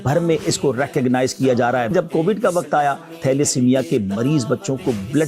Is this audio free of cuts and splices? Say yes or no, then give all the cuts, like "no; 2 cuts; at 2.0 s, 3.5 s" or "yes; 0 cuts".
no; 2 cuts; at 1.9 s, 3.2 s